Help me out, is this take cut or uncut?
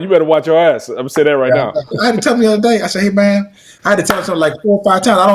cut